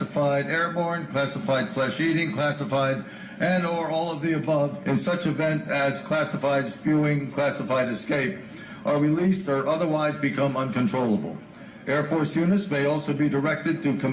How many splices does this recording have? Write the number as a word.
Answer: one